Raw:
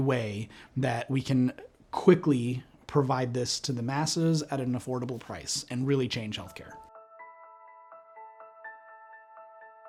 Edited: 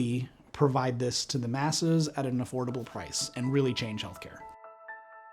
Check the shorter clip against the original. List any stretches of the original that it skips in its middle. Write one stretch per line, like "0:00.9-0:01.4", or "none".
0:06.7-0:08.1